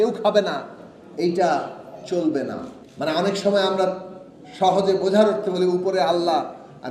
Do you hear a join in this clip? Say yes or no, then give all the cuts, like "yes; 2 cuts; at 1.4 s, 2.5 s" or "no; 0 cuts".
yes; 1 cut; at 2.8 s